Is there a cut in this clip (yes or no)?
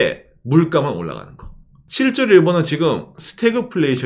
no